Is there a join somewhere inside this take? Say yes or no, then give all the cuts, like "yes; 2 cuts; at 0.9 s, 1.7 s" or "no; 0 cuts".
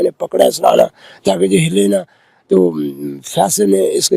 no; 0 cuts